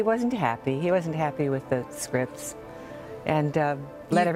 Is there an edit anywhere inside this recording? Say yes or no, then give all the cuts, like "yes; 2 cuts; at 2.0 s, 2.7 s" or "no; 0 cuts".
no; 0 cuts